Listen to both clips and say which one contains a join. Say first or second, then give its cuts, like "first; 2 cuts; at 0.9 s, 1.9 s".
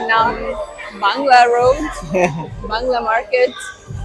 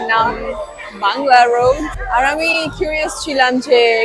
second; 1 cut; at 1.9 s